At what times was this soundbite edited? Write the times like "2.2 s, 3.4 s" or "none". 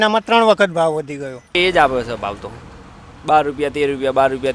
1.6 s